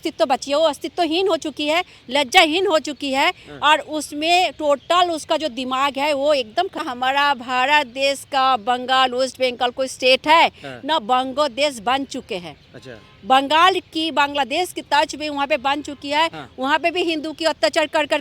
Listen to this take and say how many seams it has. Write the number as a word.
one